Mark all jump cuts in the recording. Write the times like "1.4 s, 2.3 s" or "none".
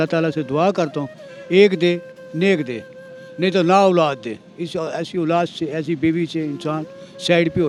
none

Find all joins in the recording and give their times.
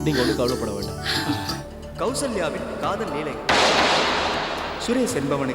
1.7 s

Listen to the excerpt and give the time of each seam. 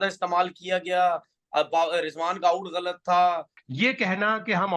3.6 s

